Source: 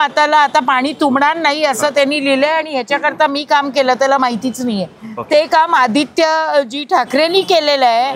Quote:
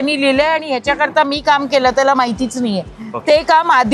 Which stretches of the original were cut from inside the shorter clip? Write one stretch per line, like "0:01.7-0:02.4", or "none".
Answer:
none